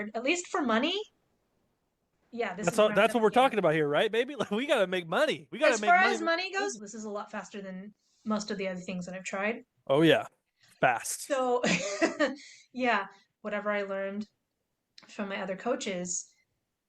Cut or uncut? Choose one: cut